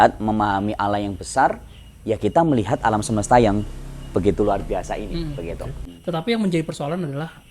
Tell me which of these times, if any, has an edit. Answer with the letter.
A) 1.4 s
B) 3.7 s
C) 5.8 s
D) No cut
C